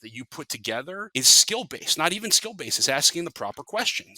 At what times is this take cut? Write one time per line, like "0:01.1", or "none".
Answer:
0:01.1